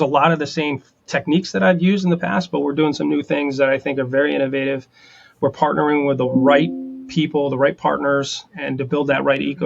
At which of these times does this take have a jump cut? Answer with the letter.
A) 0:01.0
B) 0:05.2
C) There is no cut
A